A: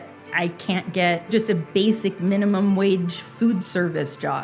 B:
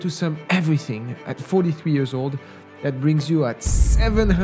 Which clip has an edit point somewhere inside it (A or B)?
A